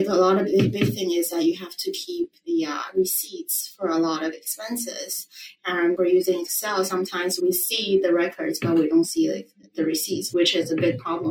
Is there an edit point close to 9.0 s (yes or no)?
no